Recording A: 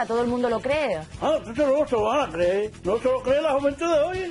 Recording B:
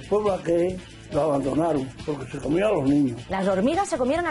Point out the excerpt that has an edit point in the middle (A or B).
B